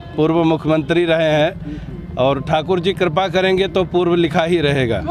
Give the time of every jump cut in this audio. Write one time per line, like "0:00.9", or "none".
none